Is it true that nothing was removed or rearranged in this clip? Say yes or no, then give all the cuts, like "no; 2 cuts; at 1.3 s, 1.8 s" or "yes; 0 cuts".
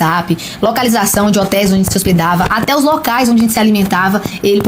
yes; 0 cuts